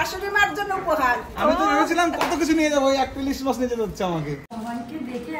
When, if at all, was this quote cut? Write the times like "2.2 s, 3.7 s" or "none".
4.4 s